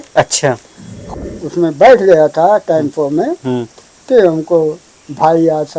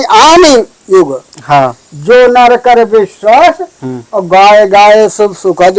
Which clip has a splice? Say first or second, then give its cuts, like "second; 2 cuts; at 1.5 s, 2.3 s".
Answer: first; 1 cut; at 1.1 s